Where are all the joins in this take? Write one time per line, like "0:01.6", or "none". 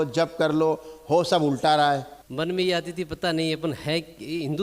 0:02.2